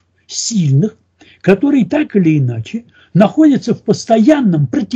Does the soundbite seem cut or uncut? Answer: uncut